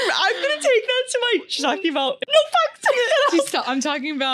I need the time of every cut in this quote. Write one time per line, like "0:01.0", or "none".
0:02.2